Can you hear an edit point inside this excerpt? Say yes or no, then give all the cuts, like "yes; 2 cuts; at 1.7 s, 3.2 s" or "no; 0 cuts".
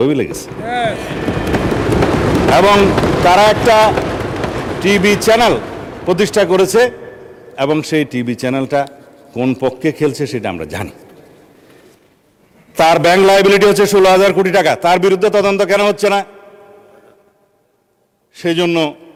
no; 0 cuts